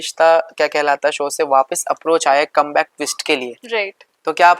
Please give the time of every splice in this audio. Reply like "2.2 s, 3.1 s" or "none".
none